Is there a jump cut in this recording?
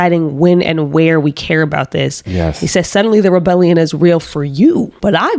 no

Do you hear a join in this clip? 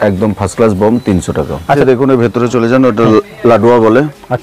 yes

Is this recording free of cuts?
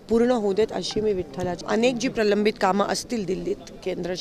no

